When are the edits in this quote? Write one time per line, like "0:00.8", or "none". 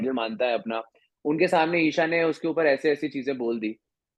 none